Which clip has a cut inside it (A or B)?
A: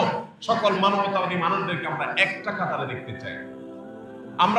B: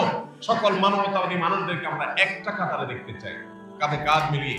B